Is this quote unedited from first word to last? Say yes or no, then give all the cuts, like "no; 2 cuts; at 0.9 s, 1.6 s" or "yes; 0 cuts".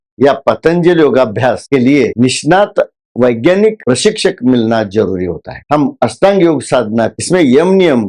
no; 2 cuts; at 5.5 s, 7.1 s